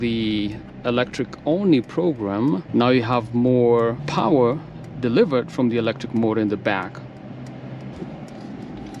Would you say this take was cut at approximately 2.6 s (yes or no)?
yes